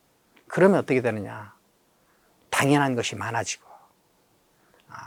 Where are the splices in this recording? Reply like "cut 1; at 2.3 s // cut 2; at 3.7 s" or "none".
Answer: none